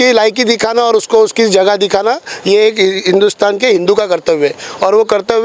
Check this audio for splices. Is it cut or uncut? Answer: uncut